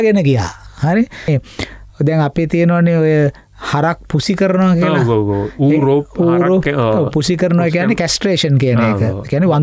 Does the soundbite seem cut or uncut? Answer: cut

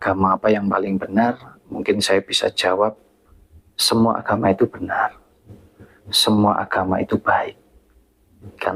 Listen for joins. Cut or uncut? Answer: uncut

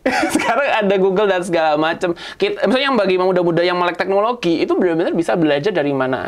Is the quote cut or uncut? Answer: uncut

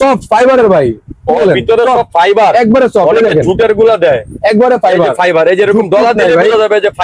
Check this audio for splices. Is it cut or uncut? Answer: uncut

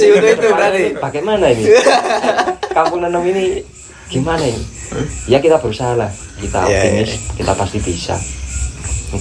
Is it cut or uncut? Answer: uncut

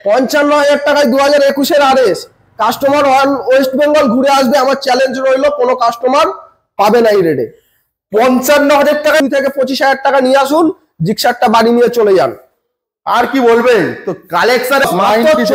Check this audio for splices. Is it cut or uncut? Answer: cut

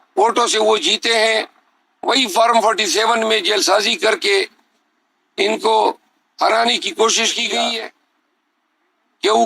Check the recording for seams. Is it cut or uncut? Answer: cut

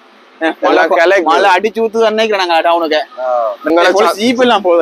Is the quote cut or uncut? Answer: cut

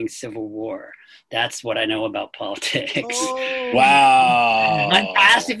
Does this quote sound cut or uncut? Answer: uncut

